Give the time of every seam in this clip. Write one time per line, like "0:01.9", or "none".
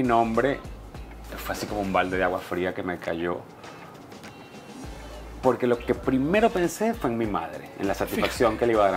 none